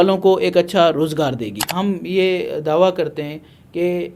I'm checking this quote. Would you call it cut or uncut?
cut